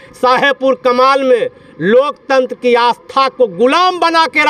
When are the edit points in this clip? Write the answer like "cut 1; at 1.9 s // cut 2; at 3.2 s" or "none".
none